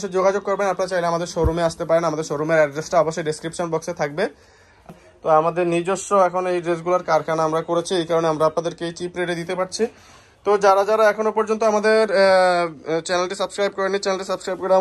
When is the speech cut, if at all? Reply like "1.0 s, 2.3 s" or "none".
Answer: 4.9 s